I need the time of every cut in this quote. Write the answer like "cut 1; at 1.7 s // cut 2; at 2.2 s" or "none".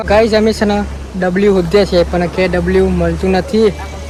none